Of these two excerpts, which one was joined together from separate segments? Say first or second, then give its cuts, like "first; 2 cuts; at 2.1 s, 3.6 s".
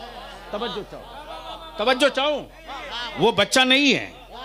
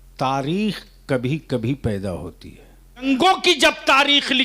second; 1 cut; at 3.0 s